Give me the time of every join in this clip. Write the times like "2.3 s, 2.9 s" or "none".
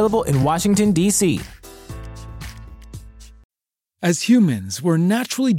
3.4 s